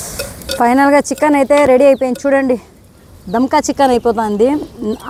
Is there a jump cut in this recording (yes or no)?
no